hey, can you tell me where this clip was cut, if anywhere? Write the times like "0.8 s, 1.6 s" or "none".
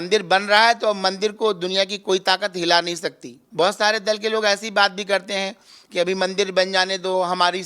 3.4 s